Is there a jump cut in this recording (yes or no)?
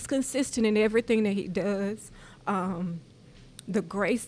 no